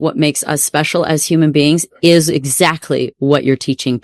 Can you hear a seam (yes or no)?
no